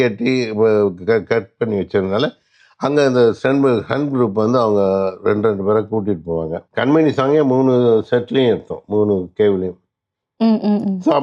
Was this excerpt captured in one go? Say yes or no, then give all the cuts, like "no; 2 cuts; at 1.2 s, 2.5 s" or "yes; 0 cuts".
no; 1 cut; at 6.6 s